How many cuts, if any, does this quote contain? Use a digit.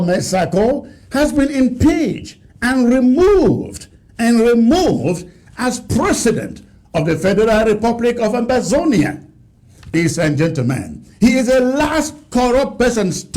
1